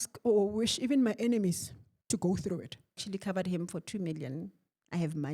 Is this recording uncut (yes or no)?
no